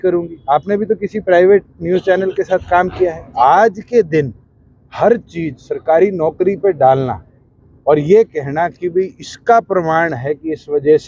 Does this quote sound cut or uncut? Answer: uncut